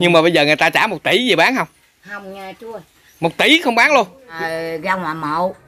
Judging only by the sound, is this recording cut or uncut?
cut